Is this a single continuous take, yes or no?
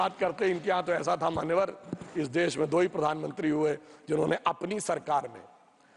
yes